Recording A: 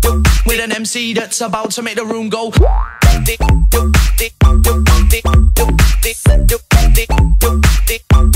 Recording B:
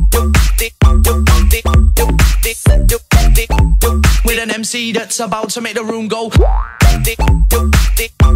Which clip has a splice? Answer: B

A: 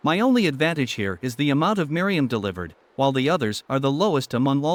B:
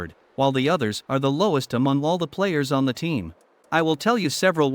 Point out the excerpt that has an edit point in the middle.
B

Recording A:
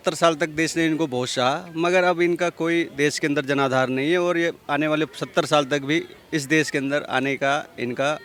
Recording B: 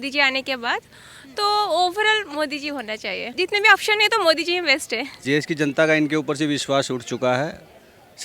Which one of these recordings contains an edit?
B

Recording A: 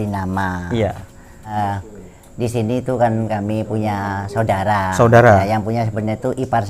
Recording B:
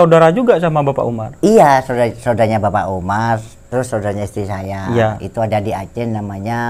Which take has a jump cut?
A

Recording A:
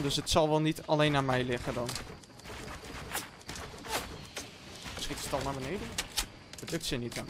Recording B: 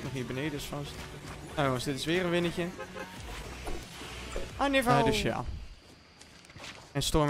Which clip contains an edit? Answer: B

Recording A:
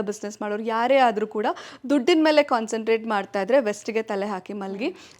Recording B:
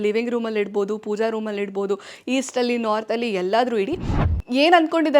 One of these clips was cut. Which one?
B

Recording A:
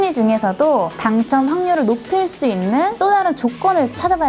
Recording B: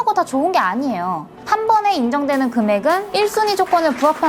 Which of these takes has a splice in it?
B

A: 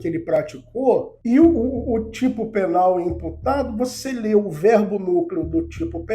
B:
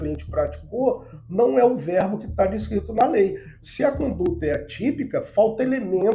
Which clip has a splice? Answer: A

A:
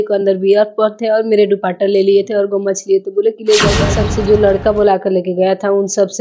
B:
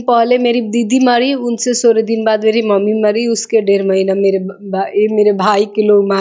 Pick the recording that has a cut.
A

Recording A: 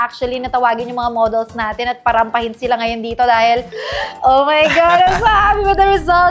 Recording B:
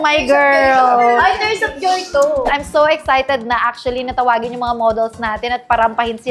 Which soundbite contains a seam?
B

